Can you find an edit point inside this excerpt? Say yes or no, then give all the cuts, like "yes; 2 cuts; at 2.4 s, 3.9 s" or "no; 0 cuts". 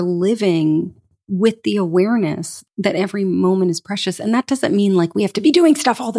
yes; 1 cut; at 2.5 s